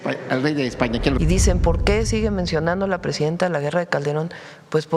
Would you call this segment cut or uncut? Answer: cut